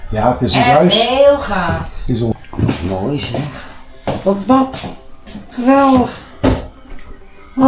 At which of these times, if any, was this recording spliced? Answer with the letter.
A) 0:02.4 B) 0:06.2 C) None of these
A